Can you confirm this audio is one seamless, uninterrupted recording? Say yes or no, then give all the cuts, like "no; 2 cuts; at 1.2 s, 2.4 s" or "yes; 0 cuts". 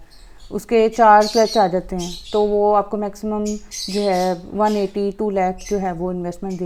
yes; 0 cuts